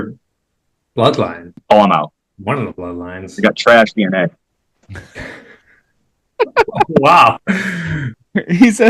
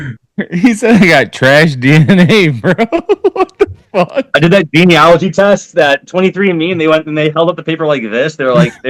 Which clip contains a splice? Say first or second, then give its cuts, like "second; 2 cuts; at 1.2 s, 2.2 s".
first; 1 cut; at 1.5 s